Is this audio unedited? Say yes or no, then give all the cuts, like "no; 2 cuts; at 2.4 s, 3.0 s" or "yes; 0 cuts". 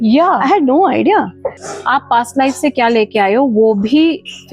no; 1 cut; at 1.6 s